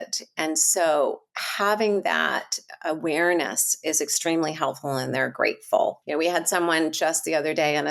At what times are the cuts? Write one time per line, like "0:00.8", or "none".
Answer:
0:06.0